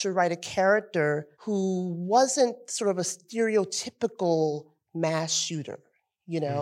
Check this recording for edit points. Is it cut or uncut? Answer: cut